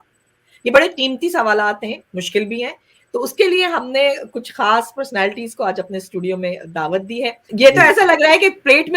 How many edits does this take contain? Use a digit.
1